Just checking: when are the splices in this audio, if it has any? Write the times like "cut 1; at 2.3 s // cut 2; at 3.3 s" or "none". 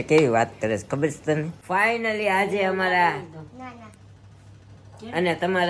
cut 1; at 1.6 s